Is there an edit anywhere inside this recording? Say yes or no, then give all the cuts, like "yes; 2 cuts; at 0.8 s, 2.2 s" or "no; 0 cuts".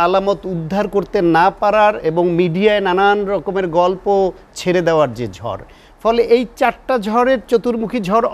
no; 0 cuts